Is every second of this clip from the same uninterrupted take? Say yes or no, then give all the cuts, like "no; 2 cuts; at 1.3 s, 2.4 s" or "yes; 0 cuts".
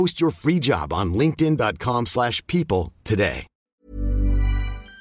no; 1 cut; at 3.8 s